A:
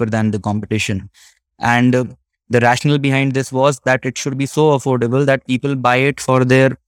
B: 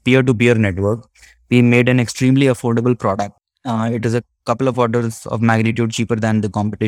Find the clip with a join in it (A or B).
B